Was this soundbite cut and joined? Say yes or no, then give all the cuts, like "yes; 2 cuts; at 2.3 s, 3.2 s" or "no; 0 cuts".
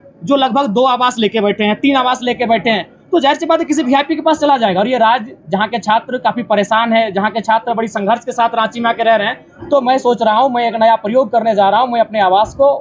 no; 0 cuts